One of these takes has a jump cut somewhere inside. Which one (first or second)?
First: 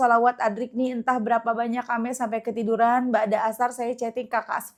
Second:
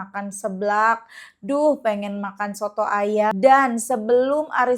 second